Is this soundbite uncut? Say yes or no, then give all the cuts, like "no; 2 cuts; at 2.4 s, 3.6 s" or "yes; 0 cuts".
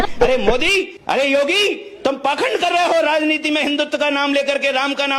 yes; 0 cuts